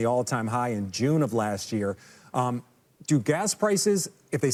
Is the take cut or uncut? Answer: uncut